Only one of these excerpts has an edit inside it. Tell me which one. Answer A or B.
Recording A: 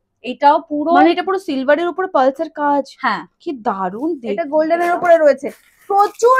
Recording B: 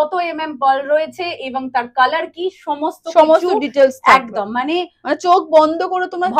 A